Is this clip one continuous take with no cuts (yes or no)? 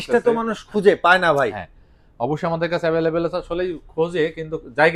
yes